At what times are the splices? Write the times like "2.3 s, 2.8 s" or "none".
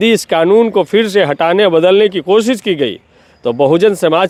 none

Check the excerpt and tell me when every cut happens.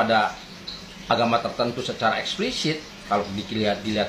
none

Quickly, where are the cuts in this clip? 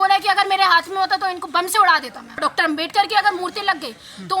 2.4 s

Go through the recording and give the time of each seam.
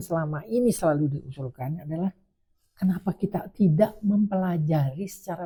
none

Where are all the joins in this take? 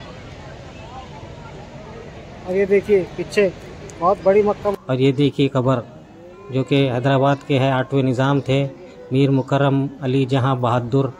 4.7 s

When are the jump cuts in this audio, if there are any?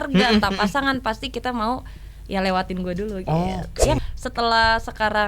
4.0 s

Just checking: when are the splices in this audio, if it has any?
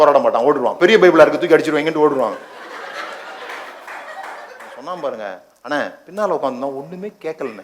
5.0 s

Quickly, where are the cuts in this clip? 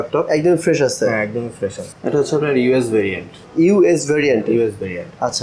1.9 s

